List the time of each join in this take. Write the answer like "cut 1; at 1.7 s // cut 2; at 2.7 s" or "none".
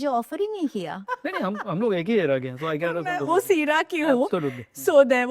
cut 1; at 1.1 s